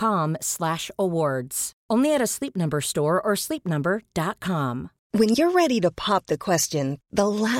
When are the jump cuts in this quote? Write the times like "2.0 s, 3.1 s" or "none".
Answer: 4.9 s